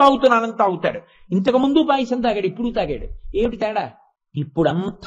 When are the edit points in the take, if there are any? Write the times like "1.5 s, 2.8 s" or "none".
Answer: 3.6 s